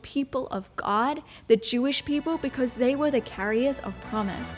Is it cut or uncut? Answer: uncut